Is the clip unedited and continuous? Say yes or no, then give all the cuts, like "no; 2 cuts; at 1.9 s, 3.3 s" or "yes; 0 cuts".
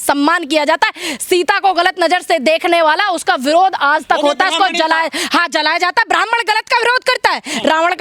yes; 0 cuts